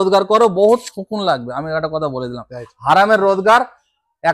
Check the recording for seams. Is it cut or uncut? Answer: uncut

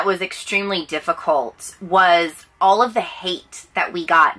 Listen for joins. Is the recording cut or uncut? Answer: uncut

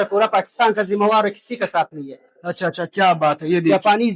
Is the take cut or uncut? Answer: uncut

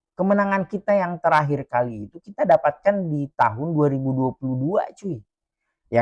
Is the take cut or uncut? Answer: uncut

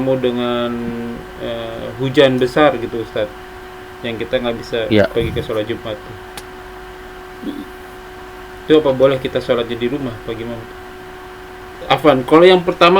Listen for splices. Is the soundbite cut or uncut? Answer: cut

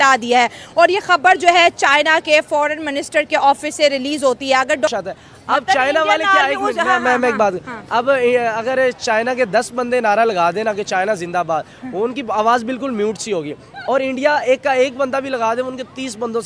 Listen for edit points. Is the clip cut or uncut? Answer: cut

